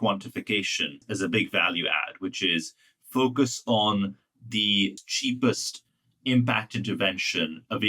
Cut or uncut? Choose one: cut